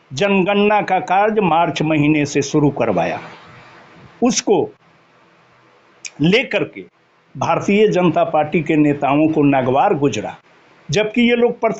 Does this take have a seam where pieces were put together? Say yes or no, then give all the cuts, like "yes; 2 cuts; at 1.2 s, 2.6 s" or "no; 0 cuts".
no; 0 cuts